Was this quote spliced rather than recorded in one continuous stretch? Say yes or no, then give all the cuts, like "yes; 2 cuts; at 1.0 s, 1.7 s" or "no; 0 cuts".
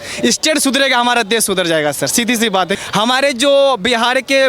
yes; 1 cut; at 2.8 s